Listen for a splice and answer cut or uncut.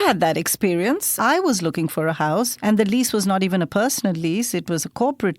cut